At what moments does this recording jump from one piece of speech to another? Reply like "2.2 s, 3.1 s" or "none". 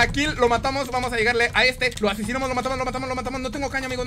1.9 s